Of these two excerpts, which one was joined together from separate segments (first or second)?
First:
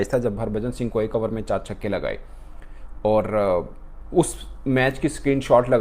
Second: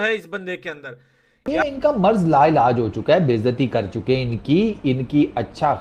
second